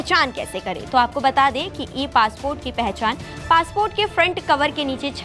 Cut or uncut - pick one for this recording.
uncut